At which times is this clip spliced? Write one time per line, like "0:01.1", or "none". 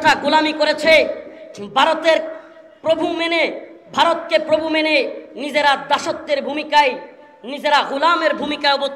none